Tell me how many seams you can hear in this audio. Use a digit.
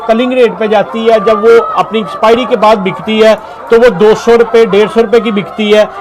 0